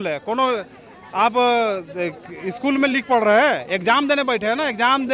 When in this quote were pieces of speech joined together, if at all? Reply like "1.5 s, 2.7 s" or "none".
none

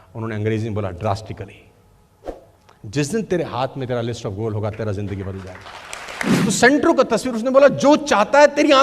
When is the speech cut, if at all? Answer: 6.4 s

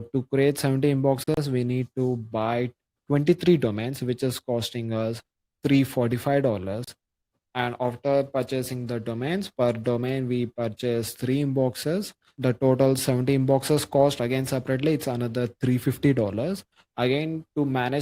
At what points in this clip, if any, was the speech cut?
12.3 s

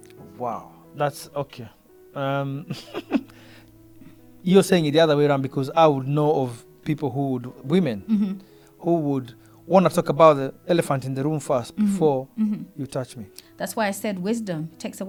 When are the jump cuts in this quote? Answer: none

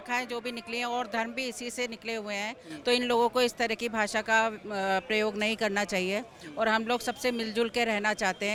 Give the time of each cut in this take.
none

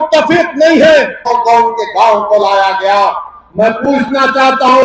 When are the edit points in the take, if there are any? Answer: 1.2 s

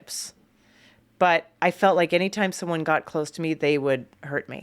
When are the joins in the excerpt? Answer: 2.8 s

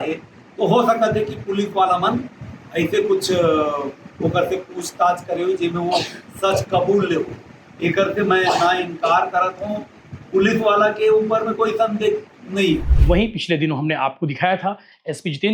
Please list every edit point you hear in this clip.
12.9 s

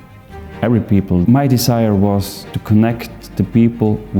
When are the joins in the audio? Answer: 1.2 s

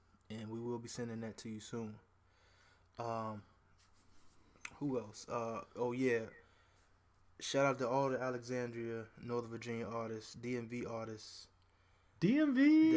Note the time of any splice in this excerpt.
6.9 s

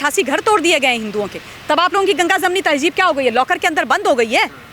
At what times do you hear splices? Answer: none

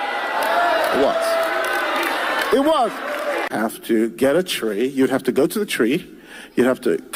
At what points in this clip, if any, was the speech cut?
3.5 s

